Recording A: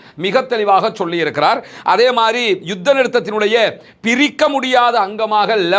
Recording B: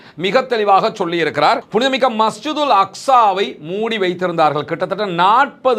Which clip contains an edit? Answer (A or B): B